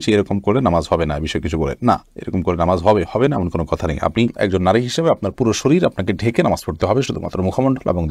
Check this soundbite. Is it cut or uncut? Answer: uncut